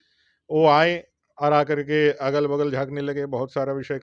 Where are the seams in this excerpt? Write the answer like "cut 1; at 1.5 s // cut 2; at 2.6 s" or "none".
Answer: none